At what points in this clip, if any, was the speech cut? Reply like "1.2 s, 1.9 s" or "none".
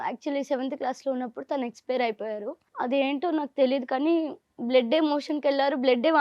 2.6 s